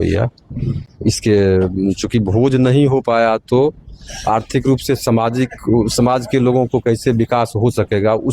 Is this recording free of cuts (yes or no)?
yes